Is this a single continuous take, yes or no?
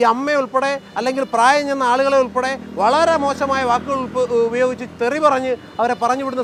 yes